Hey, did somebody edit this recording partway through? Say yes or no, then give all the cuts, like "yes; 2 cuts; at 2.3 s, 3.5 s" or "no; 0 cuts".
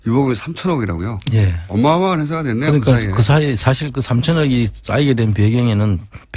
no; 0 cuts